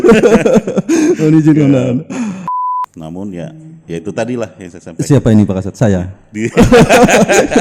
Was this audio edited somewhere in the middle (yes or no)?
yes